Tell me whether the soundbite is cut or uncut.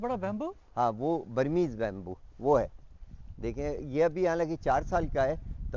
uncut